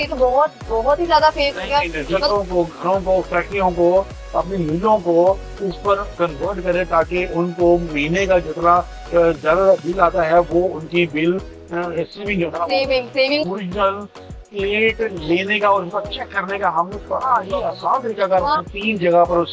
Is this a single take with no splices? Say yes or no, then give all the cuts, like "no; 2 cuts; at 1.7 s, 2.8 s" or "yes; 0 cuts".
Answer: no; 3 cuts; at 2.2 s, 13.4 s, 18.5 s